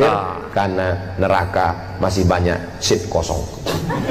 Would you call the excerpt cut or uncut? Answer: uncut